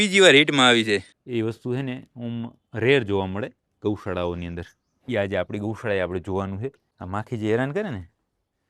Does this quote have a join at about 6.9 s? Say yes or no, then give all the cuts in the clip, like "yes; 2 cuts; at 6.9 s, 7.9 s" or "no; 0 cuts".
yes; 2 cuts; at 1.2 s, 6.9 s